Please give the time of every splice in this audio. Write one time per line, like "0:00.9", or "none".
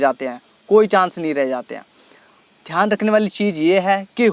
none

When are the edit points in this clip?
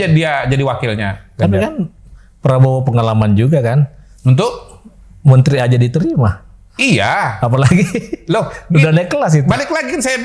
none

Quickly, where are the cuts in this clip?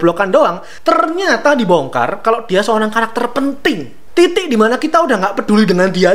0:03.9

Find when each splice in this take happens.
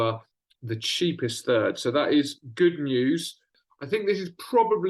0:03.6

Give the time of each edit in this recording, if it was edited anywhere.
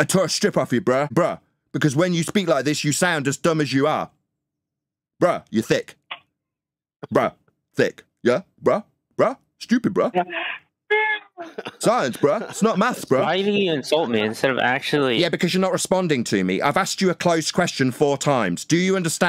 none

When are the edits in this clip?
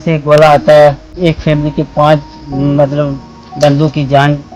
0:01.1

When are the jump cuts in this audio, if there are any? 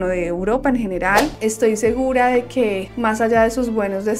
0:01.3

